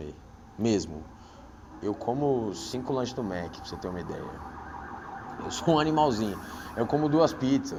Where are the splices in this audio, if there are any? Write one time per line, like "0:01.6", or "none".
none